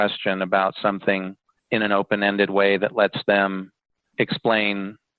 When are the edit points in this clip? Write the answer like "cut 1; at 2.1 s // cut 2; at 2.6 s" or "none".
none